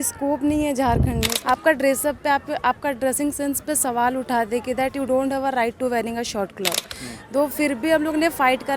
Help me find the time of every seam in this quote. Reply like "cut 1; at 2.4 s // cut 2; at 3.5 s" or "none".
cut 1; at 1.3 s